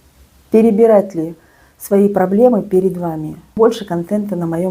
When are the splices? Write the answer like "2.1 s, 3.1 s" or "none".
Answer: 3.6 s